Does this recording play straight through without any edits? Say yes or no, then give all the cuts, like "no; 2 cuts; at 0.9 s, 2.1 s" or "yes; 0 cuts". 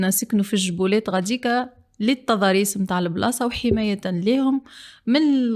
yes; 0 cuts